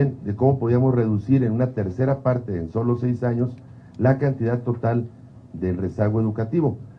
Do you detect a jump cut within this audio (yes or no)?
yes